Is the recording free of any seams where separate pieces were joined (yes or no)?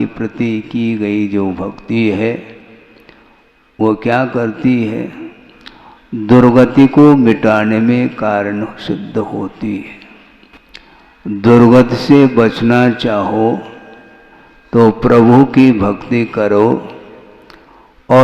no